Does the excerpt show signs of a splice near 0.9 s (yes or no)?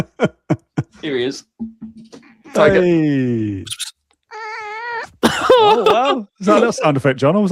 yes